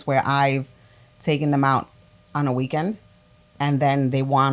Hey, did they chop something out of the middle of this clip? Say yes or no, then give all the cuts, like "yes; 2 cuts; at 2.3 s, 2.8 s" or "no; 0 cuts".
no; 0 cuts